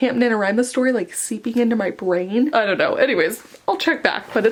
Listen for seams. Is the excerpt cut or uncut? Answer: uncut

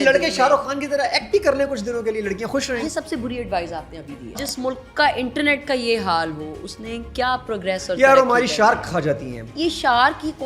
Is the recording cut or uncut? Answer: cut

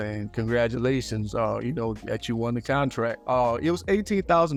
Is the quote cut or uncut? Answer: uncut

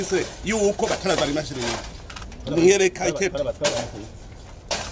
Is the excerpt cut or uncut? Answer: uncut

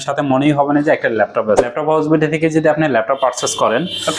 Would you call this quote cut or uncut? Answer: cut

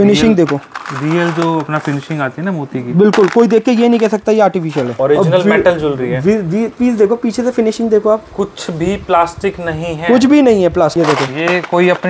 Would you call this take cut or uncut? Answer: cut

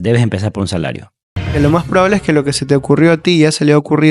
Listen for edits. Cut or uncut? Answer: cut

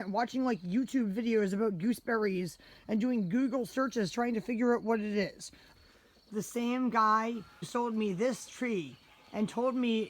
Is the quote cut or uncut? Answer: cut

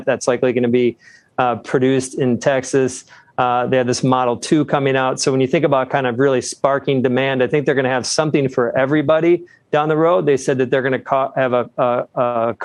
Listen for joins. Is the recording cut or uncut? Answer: uncut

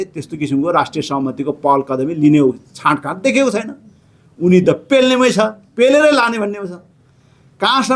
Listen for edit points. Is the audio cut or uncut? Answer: uncut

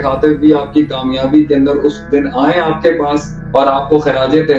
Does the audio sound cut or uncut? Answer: cut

